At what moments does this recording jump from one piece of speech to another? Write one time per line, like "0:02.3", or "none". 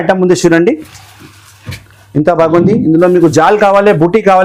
none